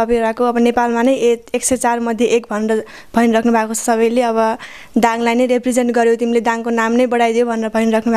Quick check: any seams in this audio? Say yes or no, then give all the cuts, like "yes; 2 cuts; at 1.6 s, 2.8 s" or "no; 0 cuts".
no; 0 cuts